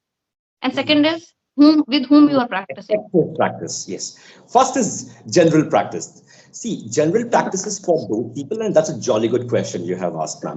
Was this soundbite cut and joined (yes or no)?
no